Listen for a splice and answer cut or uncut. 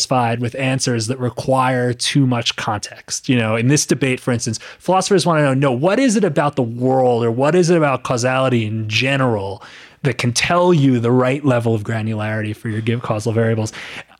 uncut